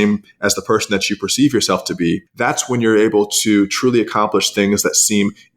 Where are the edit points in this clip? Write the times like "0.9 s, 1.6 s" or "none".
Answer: 2.3 s